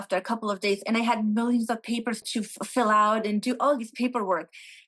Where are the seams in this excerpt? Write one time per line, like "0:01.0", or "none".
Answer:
0:02.2

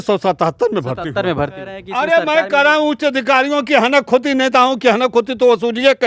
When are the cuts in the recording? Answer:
0:01.8

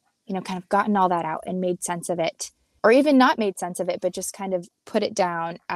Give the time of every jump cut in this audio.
0:02.7

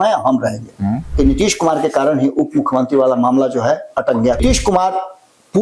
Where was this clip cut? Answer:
0:01.1
0:04.4

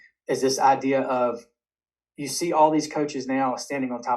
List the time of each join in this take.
none

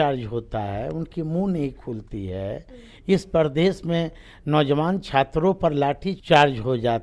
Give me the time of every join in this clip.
0:06.1

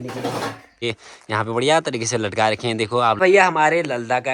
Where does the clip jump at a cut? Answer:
0:00.8
0:03.2

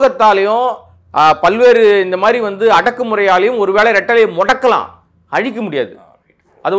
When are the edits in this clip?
none

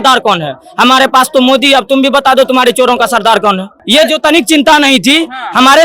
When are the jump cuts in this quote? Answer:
0:03.7

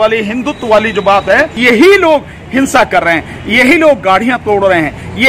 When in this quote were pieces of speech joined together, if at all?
0:01.5

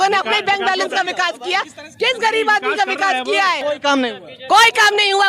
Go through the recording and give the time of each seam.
0:03.6

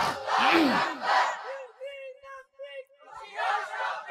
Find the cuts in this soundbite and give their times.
none

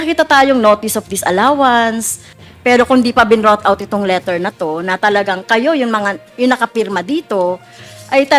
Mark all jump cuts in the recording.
0:02.3

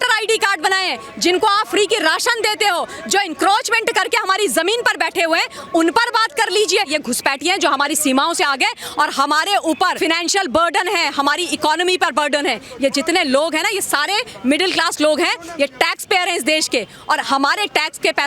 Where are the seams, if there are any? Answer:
0:06.9
0:09.9

